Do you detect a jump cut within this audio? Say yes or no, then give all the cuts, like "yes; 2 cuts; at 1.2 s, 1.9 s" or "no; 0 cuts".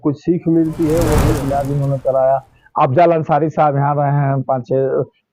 yes; 1 cut; at 1.3 s